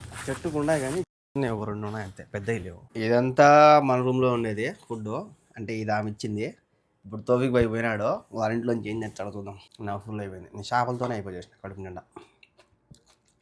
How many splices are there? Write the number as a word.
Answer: two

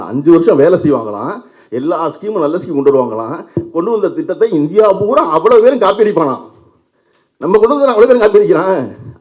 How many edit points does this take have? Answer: zero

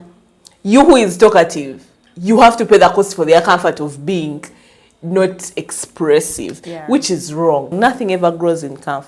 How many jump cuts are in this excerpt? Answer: one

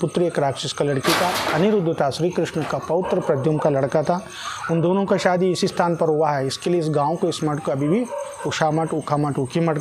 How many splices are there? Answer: zero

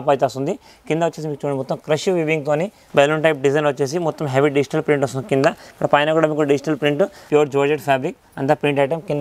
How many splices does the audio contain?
two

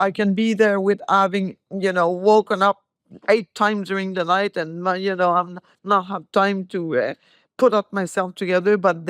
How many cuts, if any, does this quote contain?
zero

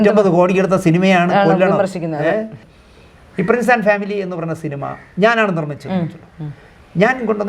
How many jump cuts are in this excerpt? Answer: one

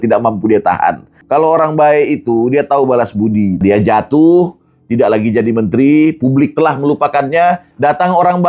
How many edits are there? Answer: three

